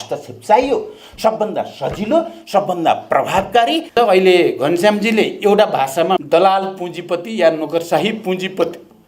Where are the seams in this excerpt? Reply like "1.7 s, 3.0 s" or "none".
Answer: 3.9 s, 6.2 s